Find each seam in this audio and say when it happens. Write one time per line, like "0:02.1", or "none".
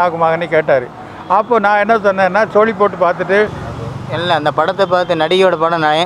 0:03.6